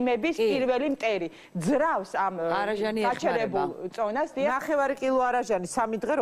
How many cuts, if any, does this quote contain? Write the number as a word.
one